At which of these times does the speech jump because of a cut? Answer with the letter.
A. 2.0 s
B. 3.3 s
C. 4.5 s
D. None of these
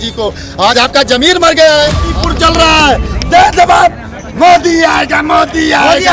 A